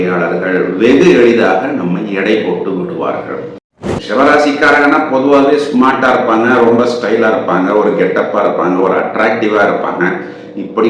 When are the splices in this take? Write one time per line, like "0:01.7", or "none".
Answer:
0:03.7